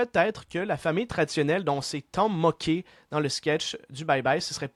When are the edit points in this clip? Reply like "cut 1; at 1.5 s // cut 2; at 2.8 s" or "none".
none